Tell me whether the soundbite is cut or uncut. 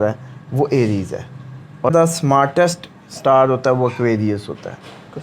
cut